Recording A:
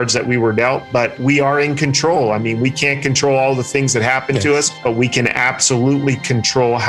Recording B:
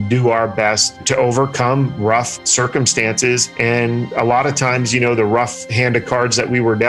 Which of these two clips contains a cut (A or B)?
B